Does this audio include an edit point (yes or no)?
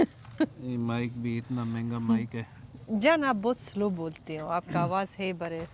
no